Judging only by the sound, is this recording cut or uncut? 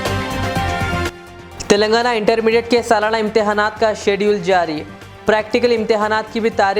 cut